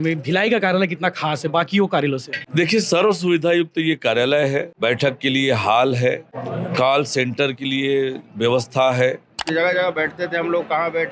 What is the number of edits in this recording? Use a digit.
4